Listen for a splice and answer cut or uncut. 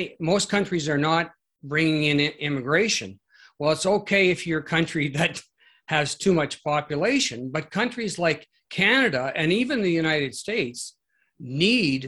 uncut